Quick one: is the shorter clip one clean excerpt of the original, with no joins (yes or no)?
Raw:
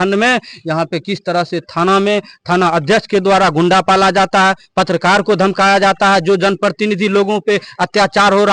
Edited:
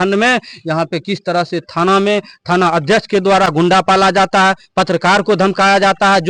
yes